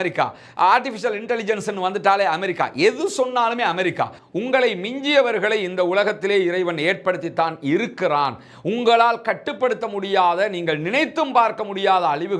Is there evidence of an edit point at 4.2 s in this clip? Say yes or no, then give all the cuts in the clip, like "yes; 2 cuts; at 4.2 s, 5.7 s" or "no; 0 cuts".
yes; 1 cut; at 4.2 s